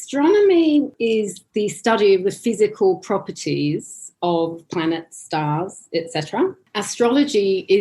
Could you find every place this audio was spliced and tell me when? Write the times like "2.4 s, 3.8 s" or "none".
0.9 s, 6.7 s